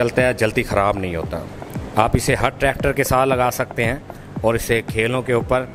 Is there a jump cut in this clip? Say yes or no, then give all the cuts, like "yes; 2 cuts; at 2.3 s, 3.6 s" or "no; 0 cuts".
no; 0 cuts